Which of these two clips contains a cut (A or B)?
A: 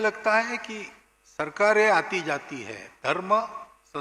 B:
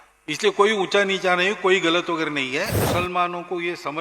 B